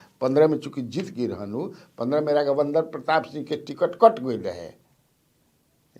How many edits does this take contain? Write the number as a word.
zero